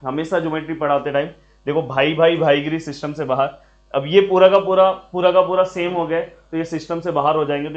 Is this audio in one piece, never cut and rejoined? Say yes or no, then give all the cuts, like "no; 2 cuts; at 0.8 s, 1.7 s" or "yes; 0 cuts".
yes; 0 cuts